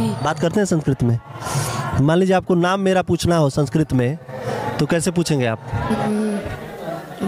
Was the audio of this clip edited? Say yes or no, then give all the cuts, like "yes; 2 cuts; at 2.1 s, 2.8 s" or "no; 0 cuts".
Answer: yes; 1 cut; at 6.0 s